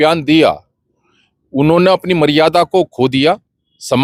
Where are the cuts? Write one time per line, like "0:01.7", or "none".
none